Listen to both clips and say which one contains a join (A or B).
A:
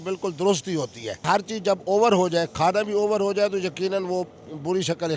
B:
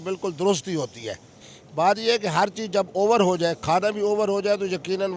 A